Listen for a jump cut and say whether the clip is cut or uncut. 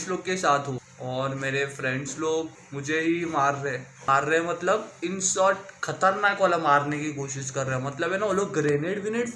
cut